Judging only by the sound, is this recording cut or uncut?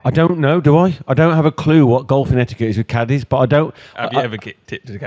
uncut